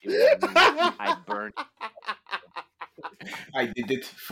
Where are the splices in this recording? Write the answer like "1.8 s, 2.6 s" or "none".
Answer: 3.3 s